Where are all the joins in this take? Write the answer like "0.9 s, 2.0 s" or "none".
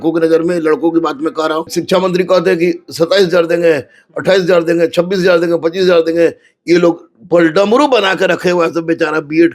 1.8 s

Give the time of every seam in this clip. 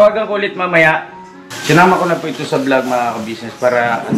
1.5 s

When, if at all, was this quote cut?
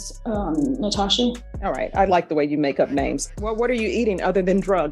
3.2 s

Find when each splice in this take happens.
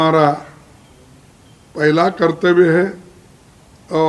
none

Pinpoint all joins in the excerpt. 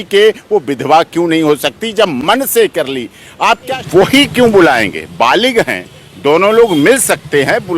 3.6 s

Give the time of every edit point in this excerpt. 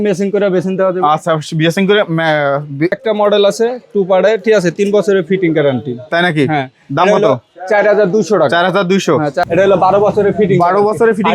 3.0 s, 9.4 s

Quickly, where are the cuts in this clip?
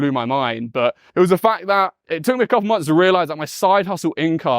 1.0 s, 2.0 s

